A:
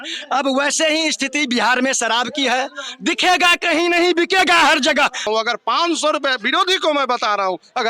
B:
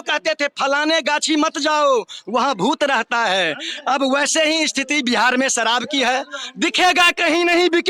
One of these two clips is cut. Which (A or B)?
A